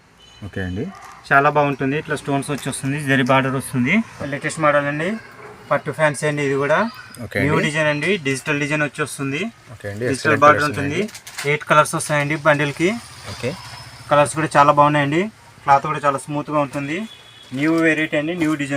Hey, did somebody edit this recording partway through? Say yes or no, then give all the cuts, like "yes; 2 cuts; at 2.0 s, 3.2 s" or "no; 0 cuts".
yes; 1 cut; at 4.2 s